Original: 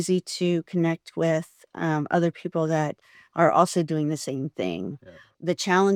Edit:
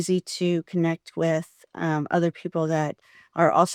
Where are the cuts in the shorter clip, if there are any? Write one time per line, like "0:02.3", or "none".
none